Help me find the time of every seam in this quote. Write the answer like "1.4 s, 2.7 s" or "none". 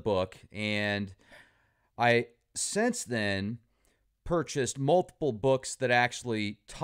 3.2 s